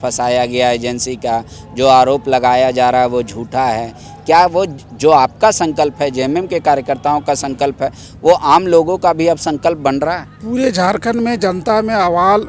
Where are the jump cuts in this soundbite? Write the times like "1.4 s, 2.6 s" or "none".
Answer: none